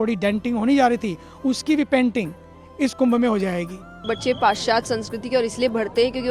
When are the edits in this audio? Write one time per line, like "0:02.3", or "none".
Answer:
0:04.0